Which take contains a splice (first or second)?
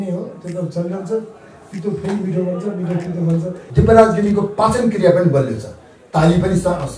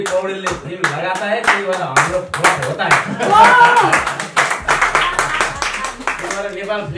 first